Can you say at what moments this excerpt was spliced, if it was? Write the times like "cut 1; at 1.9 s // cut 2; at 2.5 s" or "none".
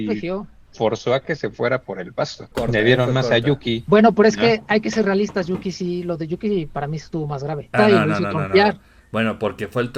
cut 1; at 2.4 s // cut 2; at 7.7 s